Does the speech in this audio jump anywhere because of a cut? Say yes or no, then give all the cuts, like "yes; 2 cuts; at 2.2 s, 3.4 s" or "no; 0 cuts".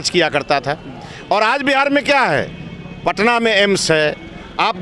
no; 0 cuts